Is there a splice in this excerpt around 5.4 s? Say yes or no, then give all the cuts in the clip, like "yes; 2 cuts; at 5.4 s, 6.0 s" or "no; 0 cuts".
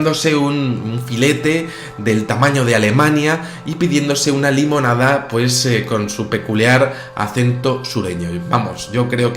yes; 1 cut; at 5.4 s